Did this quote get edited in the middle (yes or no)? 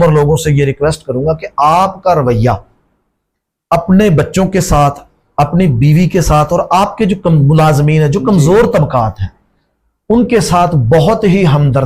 no